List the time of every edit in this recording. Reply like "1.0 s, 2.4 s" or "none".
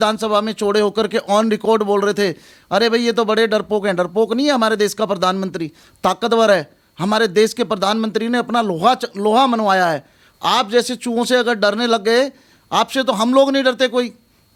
none